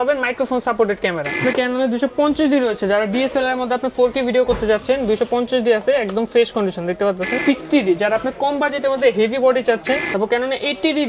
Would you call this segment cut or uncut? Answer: cut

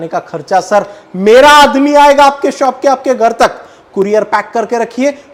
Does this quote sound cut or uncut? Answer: uncut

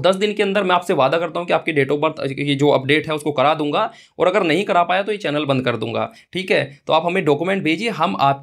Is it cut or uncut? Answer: uncut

